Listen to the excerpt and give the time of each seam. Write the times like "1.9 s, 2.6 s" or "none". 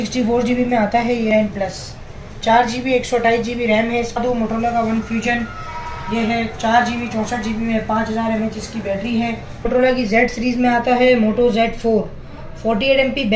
1.3 s, 4.2 s, 9.7 s